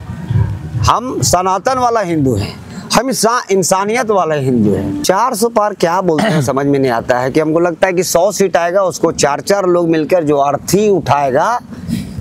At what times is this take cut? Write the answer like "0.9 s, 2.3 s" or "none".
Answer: 4.9 s